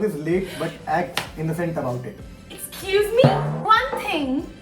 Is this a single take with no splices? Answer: no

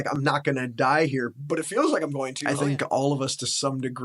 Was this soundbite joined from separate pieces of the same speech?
yes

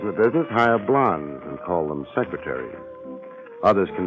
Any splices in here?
no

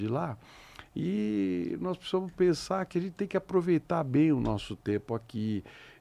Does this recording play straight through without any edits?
yes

